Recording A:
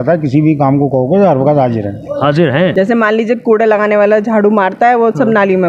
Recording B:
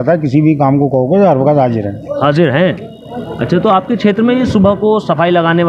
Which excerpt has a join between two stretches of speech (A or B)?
A